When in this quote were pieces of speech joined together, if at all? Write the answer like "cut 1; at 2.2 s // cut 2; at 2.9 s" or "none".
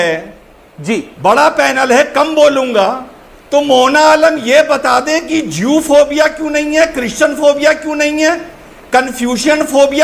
none